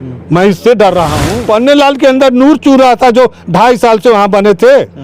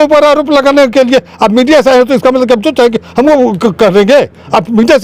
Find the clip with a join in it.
first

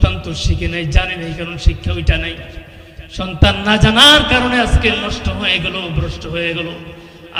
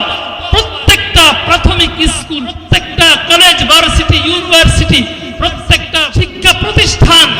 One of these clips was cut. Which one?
second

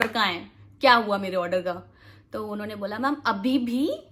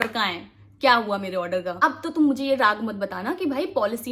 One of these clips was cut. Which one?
second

